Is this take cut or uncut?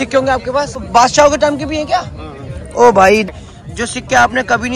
cut